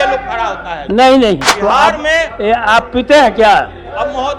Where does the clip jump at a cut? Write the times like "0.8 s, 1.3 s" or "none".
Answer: 1.5 s